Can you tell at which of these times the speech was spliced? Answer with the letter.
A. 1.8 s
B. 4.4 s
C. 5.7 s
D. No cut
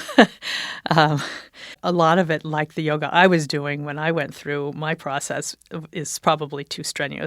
A